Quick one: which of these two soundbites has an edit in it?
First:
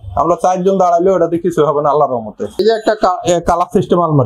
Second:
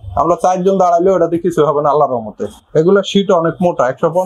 first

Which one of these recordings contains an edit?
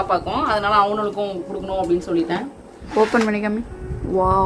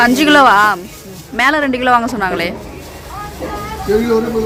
first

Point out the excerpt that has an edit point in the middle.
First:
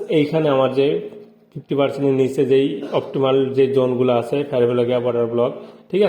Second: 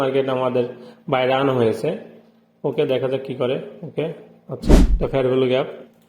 second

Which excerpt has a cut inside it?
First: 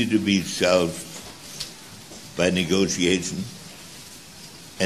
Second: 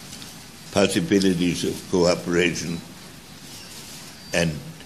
first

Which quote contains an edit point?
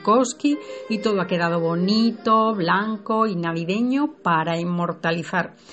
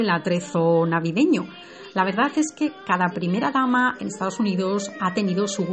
second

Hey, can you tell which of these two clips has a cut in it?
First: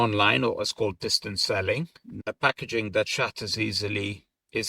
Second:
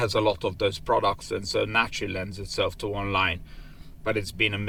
first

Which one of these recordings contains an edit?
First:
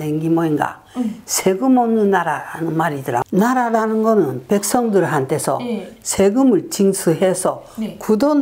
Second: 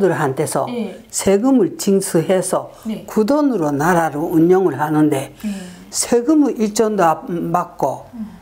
first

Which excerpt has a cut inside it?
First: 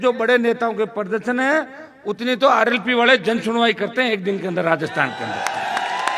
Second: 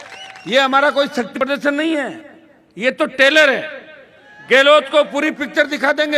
second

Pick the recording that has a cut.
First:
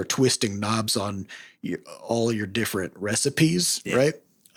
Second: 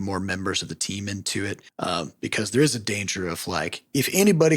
second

